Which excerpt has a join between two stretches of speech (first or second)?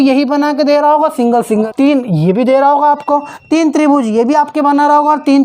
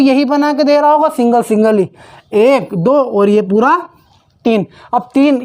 first